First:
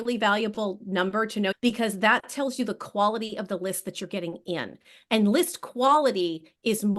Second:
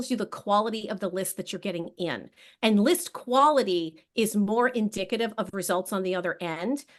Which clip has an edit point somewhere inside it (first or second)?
first